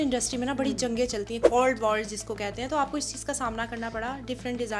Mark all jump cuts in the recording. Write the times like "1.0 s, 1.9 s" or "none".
none